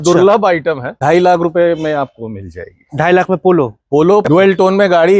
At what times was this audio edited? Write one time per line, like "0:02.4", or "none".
0:00.9
0:04.3